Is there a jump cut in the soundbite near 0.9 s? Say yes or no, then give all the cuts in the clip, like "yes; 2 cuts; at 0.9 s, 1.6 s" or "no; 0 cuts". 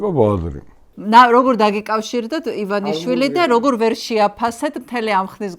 yes; 1 cut; at 0.9 s